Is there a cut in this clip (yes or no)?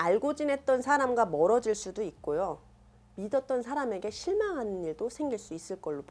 no